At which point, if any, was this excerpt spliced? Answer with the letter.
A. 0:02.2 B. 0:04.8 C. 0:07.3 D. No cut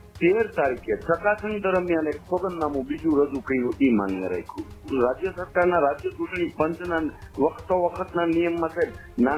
B